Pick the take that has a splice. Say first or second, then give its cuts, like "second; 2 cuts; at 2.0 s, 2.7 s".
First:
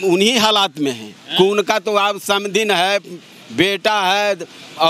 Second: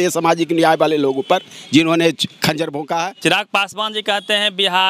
second; 1 cut; at 3.1 s